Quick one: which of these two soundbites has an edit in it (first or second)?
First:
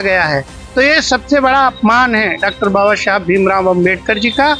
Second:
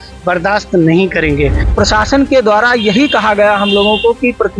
second